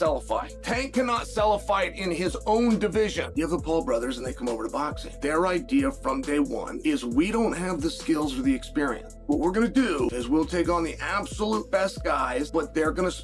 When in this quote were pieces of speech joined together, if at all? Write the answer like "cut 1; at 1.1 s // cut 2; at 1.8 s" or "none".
none